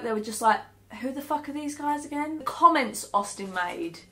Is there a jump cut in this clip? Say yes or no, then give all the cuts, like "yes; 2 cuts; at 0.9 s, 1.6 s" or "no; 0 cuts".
yes; 1 cut; at 2.4 s